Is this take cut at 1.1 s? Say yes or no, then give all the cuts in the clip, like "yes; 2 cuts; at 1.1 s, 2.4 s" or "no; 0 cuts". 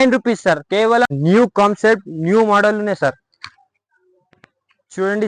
yes; 1 cut; at 1.1 s